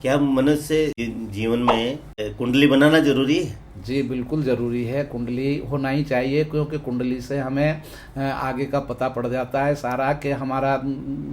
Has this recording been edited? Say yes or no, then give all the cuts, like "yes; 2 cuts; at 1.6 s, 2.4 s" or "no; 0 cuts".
yes; 2 cuts; at 1.0 s, 2.3 s